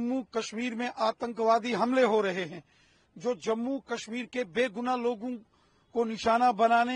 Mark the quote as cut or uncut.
uncut